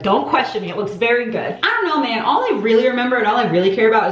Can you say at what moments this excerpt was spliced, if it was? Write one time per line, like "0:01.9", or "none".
0:01.6